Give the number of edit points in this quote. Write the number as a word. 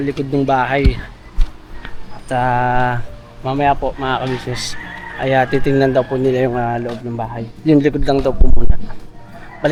zero